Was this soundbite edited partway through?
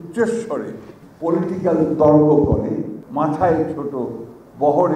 no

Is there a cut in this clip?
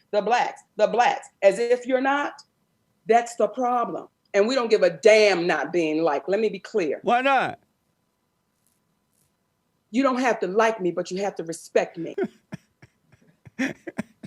yes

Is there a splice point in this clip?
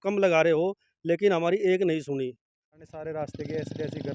yes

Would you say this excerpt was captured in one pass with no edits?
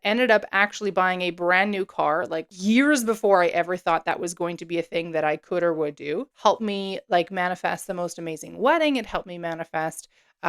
no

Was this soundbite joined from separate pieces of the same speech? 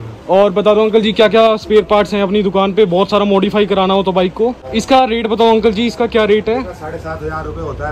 yes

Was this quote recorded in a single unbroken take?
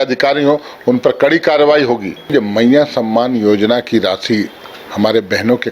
no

